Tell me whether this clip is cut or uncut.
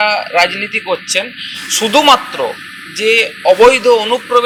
uncut